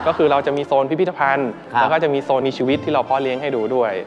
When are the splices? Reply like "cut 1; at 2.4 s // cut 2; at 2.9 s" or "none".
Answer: cut 1; at 2.4 s